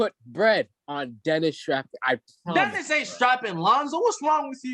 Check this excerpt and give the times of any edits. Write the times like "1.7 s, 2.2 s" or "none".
none